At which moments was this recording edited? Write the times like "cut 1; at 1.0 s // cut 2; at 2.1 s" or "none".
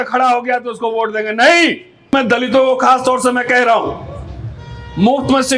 cut 1; at 2.1 s